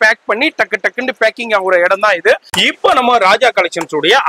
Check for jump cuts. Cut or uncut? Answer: cut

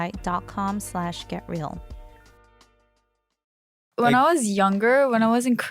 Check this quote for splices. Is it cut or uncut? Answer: cut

